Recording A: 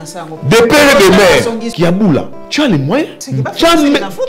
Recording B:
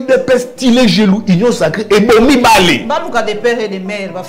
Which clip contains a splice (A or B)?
A